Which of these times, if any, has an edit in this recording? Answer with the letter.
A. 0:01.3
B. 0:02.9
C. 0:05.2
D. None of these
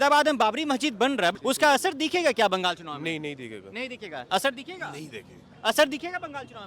A